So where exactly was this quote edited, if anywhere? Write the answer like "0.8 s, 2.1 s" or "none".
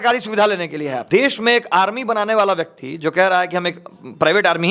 1.0 s